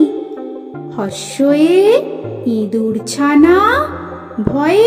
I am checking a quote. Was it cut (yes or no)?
no